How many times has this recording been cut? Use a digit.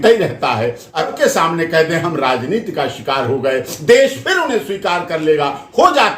1